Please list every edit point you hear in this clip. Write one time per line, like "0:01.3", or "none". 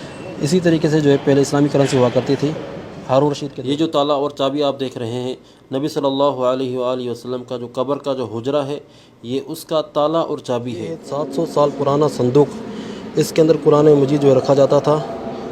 0:03.5
0:11.1